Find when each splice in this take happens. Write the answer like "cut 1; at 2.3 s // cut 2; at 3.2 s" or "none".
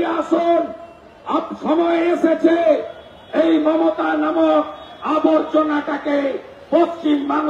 none